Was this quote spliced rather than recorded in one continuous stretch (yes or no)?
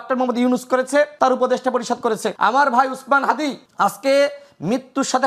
yes